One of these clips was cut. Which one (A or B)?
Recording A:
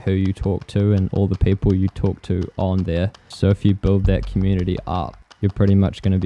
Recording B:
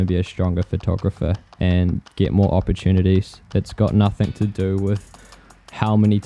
A